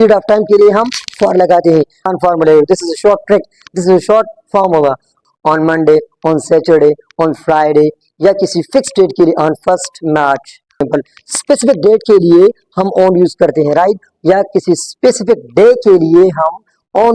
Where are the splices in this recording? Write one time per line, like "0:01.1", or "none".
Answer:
0:02.1
0:05.2
0:10.9